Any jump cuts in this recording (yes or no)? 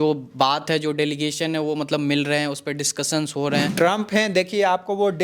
yes